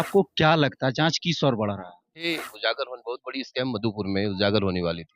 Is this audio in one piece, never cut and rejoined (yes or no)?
no